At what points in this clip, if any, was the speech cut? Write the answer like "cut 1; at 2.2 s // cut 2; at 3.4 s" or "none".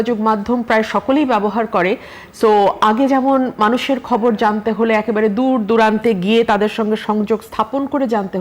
none